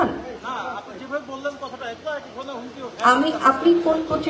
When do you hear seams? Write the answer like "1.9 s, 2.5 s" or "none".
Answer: none